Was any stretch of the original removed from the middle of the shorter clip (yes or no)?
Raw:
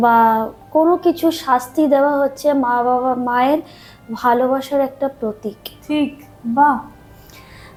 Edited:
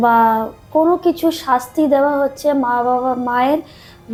no